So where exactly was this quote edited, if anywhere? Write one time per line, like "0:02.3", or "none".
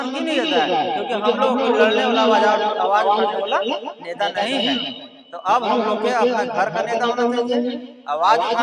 none